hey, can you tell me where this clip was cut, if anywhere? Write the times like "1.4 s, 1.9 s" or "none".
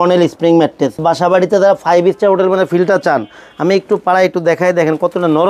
1.0 s